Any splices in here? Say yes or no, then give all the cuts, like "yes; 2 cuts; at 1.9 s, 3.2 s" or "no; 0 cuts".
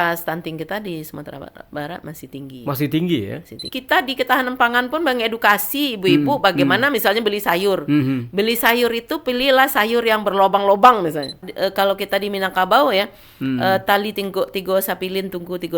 yes; 2 cuts; at 3.7 s, 11.4 s